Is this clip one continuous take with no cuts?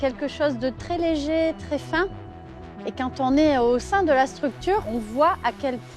no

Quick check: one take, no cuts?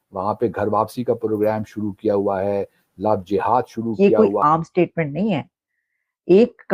no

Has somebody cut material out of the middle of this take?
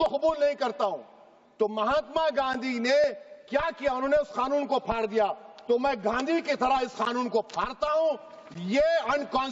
no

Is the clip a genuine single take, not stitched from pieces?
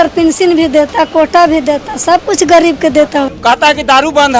no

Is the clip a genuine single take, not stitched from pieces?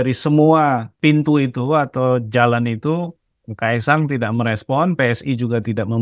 no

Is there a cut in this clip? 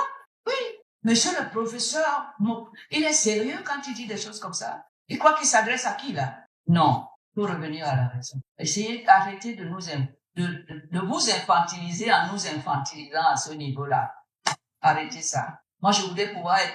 no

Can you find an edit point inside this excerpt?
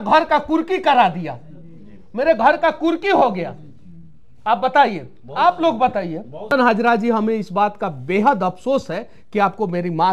yes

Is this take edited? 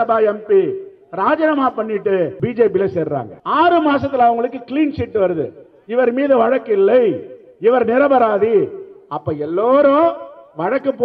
yes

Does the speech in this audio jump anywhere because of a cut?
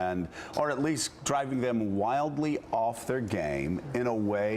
yes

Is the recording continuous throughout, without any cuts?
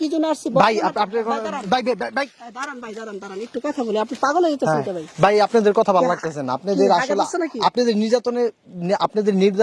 yes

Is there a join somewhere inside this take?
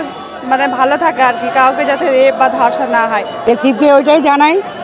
yes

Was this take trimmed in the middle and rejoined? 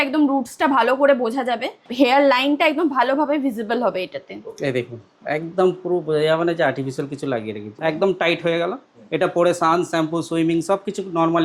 yes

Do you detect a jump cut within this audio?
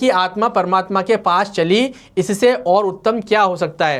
no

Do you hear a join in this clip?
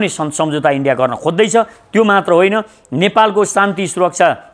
no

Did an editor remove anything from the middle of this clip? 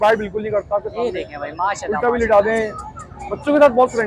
no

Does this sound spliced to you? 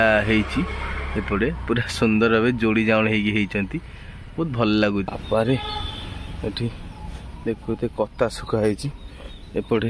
yes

